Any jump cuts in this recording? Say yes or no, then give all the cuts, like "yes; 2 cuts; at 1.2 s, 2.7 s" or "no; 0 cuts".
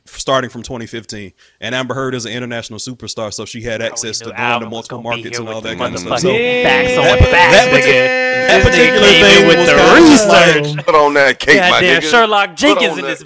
no; 0 cuts